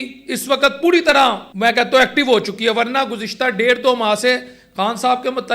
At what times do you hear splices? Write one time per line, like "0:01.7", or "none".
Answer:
0:01.5